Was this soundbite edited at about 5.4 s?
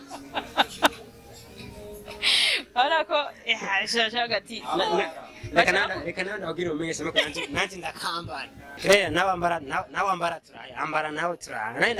no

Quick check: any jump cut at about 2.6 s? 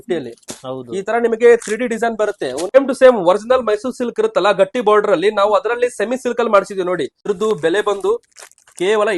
yes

